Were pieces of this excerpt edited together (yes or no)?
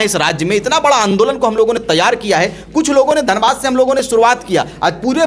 no